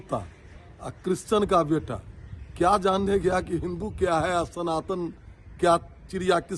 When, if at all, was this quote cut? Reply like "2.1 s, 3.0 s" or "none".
none